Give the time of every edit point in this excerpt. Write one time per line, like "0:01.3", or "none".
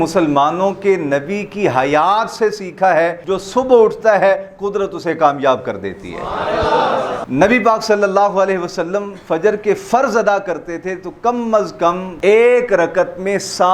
0:03.2
0:07.2
0:12.1